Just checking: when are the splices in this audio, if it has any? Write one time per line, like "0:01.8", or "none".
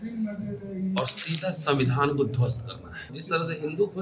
0:03.1